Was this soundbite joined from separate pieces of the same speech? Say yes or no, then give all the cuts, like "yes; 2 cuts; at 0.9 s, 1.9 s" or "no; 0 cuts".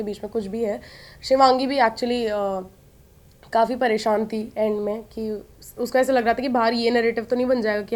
no; 0 cuts